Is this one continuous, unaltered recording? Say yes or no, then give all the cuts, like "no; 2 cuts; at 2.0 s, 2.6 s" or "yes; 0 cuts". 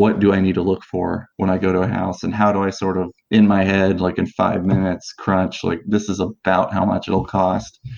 yes; 0 cuts